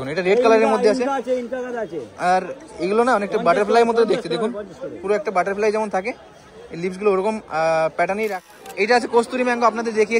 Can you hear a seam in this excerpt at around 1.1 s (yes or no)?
no